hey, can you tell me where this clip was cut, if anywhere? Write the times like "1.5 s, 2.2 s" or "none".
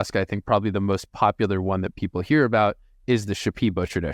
none